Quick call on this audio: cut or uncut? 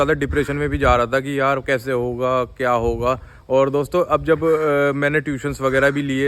uncut